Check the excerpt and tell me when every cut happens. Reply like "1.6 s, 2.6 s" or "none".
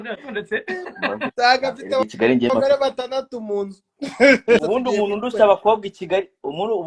4.6 s